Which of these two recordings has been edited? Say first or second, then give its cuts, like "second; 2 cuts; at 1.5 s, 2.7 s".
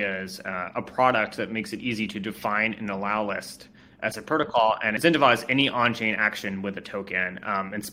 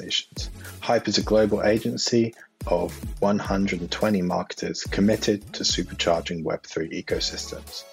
first; 1 cut; at 4.9 s